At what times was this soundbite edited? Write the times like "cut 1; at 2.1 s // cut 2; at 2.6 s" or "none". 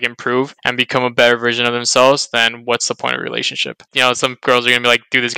cut 1; at 3.9 s